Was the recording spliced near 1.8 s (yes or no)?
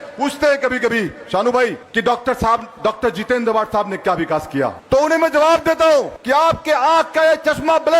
yes